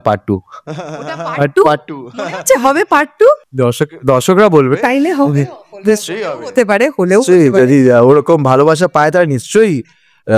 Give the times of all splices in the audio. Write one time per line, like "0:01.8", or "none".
none